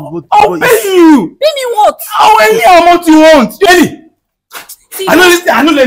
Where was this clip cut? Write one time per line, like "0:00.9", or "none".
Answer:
0:03.7